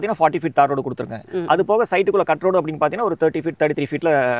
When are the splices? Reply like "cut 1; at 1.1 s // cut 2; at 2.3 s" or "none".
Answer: none